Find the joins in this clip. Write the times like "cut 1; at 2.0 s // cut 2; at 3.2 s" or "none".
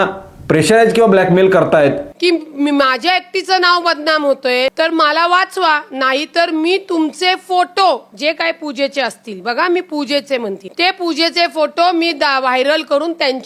cut 1; at 2.2 s